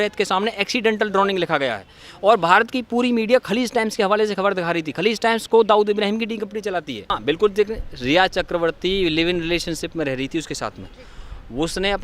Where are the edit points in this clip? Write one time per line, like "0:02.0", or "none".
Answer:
0:07.2